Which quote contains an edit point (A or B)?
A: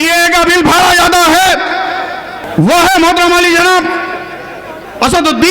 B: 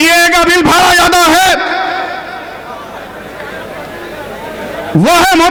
A